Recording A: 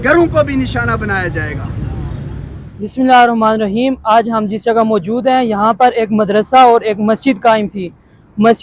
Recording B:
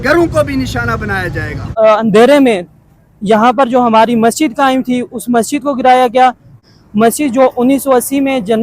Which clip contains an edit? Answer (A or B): B